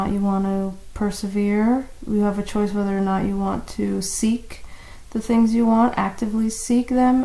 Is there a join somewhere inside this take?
no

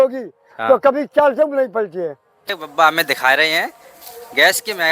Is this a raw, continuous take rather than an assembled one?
no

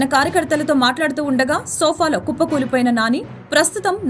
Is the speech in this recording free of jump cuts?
yes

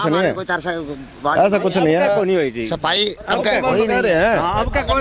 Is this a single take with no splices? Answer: yes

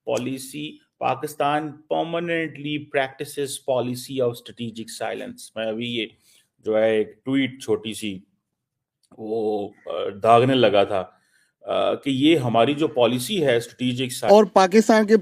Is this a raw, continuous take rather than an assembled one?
no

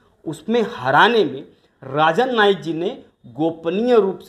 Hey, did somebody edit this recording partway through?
no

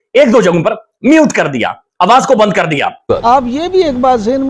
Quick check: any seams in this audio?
yes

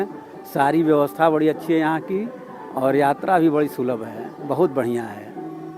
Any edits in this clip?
no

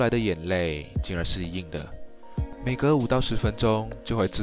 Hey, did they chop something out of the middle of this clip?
no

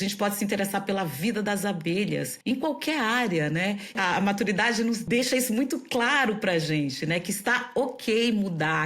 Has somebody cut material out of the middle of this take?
yes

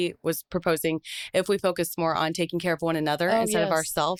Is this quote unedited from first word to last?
yes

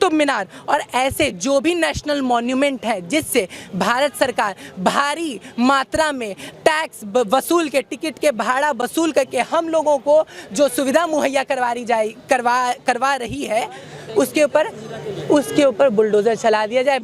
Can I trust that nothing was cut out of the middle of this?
yes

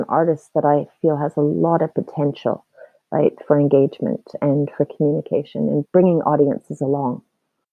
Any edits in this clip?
yes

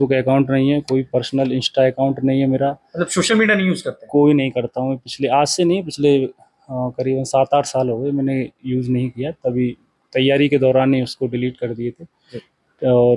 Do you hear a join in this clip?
no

